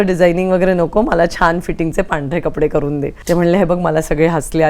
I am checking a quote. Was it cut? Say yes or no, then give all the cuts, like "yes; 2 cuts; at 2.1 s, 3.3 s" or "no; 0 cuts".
yes; 1 cut; at 3.1 s